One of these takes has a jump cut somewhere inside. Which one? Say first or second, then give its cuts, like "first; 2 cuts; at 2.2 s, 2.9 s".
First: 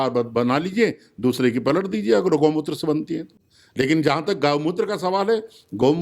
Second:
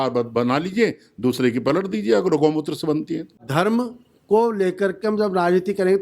second; 1 cut; at 3.4 s